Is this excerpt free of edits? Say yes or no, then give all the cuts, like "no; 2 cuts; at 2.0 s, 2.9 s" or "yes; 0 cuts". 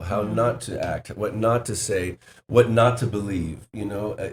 yes; 0 cuts